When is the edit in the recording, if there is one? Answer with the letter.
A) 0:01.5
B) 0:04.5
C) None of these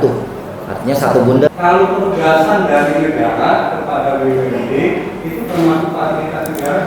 A